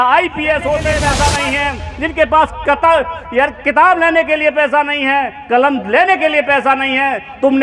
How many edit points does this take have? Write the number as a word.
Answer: one